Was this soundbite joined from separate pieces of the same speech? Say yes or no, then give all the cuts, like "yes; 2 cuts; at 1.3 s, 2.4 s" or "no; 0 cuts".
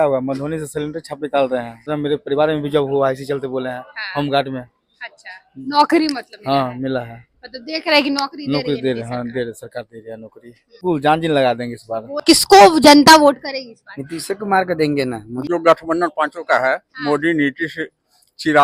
yes; 4 cuts; at 1.9 s, 10.8 s, 12.2 s, 15.4 s